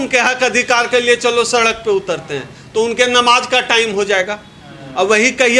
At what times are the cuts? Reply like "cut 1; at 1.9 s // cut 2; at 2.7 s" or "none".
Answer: none